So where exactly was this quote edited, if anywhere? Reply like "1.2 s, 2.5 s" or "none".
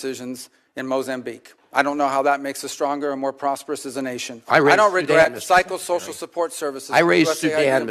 none